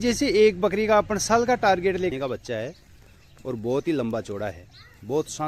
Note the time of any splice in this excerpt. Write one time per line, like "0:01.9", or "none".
0:02.1